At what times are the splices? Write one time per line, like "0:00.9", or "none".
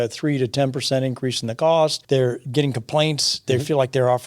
0:02.0